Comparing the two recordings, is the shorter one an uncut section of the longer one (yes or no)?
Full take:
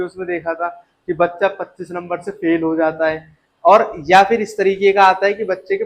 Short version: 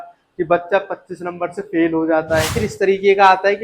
no